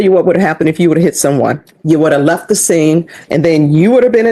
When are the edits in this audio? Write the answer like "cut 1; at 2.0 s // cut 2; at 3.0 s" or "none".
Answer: cut 1; at 1.7 s // cut 2; at 3.2 s